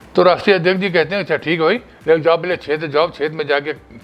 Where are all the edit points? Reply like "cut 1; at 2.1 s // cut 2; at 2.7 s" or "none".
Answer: none